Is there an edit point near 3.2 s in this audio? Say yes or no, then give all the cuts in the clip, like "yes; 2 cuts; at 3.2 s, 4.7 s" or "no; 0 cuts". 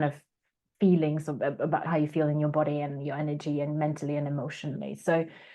no; 1 cut; at 1.8 s